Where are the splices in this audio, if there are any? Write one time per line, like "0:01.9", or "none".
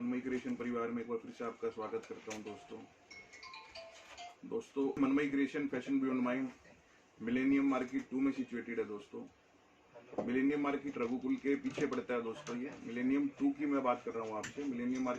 0:05.0